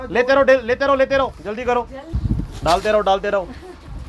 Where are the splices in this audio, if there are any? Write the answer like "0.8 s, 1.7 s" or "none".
2.1 s